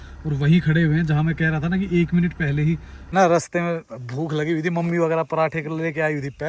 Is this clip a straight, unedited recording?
no; 1 cut; at 3.1 s

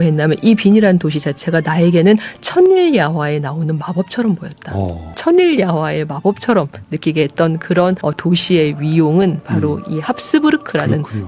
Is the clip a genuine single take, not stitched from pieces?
no; 2 cuts; at 5.2 s, 8.0 s

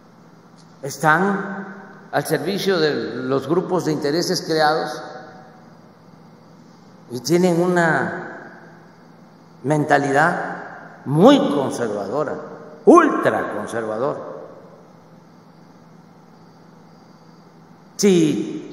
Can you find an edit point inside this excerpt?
no; 0 cuts

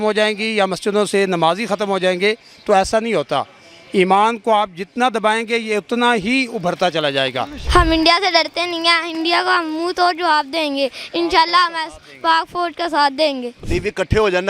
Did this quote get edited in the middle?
yes; 2 cuts; at 7.6 s, 13.6 s

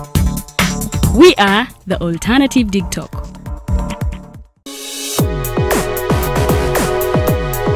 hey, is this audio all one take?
yes; 0 cuts

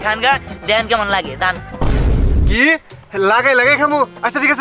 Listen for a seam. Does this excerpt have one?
no; 0 cuts

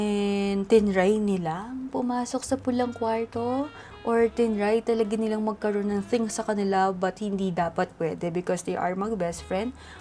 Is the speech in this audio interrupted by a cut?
no; 0 cuts

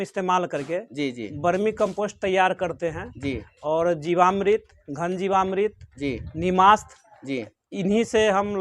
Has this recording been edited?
no; 0 cuts

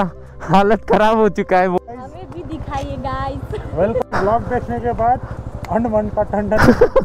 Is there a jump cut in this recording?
yes; 2 cuts; at 1.8 s, 4.0 s

